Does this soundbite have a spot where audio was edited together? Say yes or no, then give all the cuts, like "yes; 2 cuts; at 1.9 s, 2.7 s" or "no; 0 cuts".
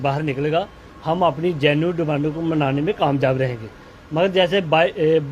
yes; 1 cut; at 1.5 s